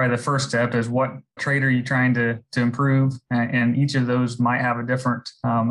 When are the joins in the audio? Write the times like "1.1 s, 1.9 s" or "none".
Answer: 1.4 s